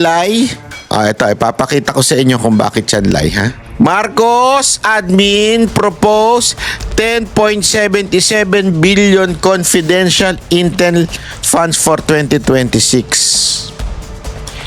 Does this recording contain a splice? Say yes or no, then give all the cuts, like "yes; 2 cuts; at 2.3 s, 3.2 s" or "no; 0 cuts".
yes; 1 cut; at 3.6 s